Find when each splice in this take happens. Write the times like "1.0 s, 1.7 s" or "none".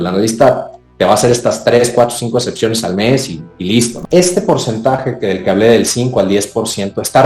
4.0 s